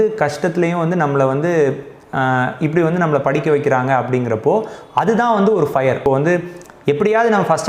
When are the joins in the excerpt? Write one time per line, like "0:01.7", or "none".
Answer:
0:06.0